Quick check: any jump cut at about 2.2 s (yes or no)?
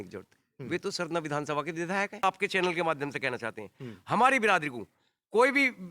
yes